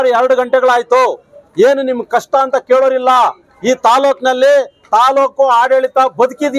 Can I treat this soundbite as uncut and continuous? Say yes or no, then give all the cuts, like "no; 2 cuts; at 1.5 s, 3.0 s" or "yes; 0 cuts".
yes; 0 cuts